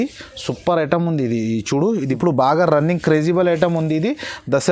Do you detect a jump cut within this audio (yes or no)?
yes